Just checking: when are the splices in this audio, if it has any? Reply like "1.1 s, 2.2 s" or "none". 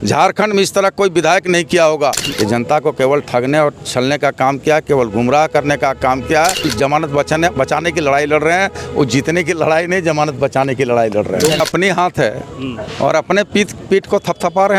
2.3 s, 6.7 s, 11.6 s